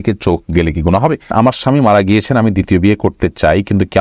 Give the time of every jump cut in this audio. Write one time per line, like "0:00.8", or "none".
0:01.3

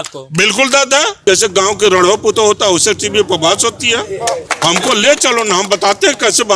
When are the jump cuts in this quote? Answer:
0:01.1
0:04.5

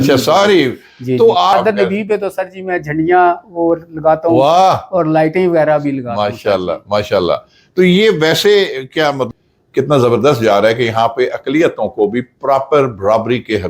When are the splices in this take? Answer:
0:01.5
0:09.3

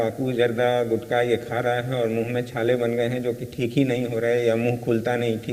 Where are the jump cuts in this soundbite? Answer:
none

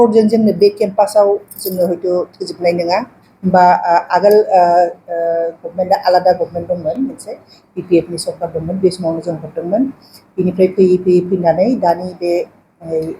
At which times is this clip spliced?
0:03.2

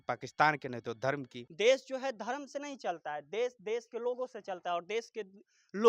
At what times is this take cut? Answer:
0:01.4

